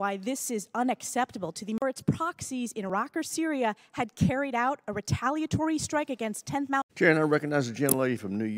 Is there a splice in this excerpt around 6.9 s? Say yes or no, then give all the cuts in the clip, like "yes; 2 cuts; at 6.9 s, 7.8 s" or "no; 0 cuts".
yes; 2 cuts; at 1.8 s, 6.9 s